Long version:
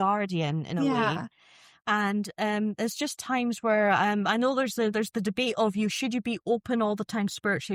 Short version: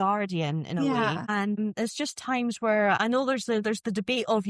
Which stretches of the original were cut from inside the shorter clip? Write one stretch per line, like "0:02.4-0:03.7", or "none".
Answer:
0:01.5-0:02.6
0:04.0-0:04.3